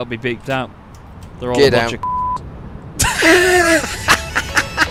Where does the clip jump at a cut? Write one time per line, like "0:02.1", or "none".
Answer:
none